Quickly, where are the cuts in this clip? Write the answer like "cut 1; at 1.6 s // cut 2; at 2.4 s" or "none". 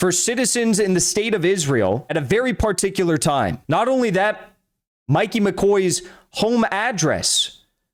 none